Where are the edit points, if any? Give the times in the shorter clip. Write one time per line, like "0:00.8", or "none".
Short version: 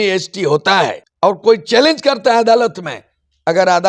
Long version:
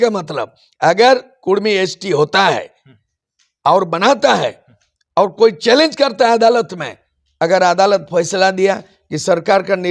0:01.0